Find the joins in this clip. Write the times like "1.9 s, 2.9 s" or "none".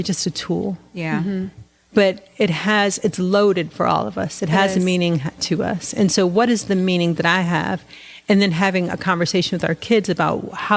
none